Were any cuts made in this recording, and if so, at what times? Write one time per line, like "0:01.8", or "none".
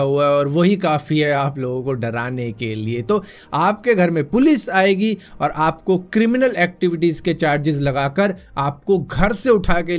0:03.4